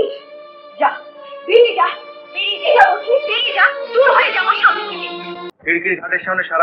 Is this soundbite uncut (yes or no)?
no